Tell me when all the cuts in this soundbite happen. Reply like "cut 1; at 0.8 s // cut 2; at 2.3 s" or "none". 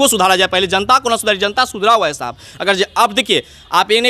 none

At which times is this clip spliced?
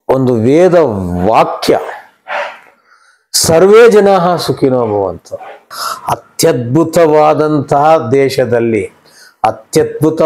cut 1; at 5.7 s

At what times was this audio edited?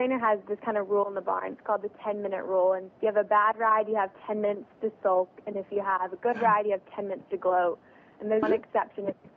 cut 1; at 2.9 s // cut 2; at 8.4 s

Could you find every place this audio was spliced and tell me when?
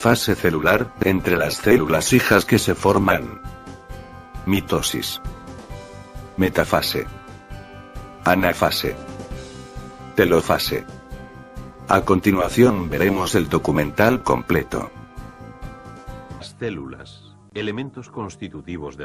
cut 1; at 8.5 s

